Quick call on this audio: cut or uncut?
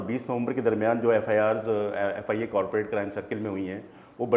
uncut